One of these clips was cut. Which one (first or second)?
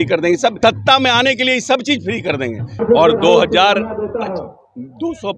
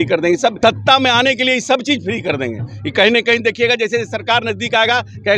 first